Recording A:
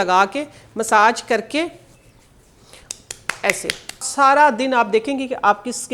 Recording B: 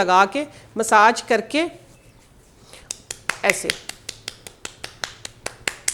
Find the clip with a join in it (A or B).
A